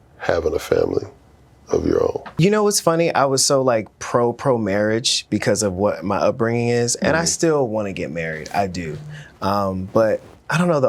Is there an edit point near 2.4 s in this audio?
yes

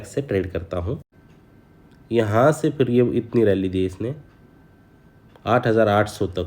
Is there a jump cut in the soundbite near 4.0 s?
no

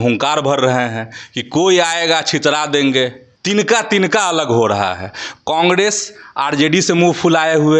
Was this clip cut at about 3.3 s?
yes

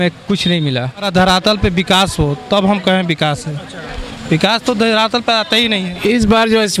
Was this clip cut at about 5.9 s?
yes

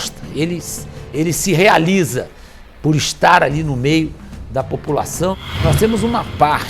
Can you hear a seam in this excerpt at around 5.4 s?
yes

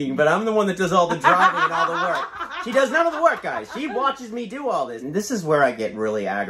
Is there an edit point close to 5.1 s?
yes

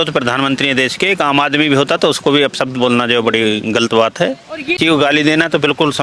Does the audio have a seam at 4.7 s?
yes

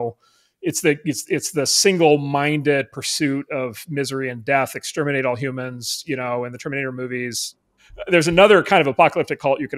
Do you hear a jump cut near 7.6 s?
yes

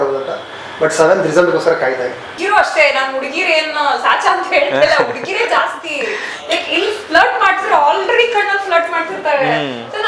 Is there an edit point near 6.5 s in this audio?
no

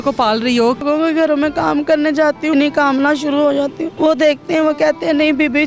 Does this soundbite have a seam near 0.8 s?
yes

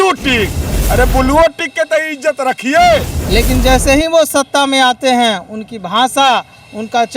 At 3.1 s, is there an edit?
yes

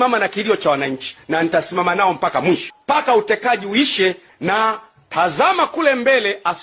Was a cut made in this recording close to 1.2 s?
no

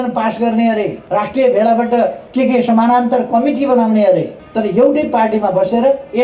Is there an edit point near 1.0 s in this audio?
yes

